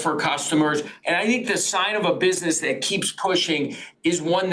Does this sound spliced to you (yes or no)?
yes